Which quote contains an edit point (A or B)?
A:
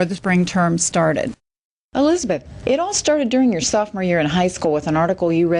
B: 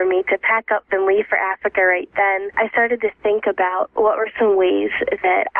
A